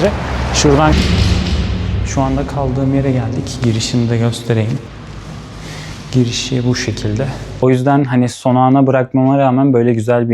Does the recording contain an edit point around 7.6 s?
yes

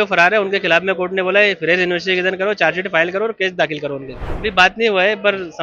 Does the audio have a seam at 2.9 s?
no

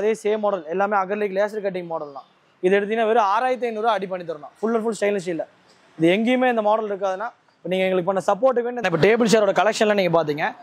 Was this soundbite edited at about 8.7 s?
yes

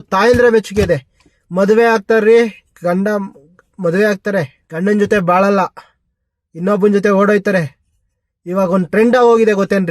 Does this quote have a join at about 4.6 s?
yes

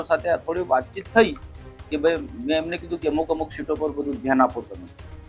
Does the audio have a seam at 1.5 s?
no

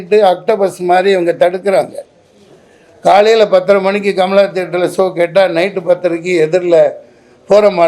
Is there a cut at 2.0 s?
no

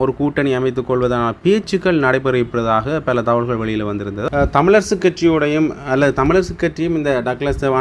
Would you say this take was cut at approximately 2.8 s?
no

